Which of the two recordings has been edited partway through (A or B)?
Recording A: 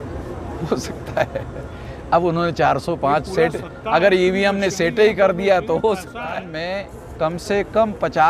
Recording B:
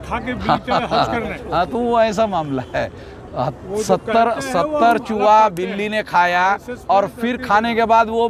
A